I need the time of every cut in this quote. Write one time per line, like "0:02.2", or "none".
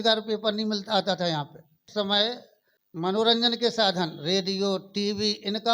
0:01.8